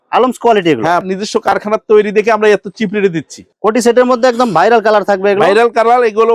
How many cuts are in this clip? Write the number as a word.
two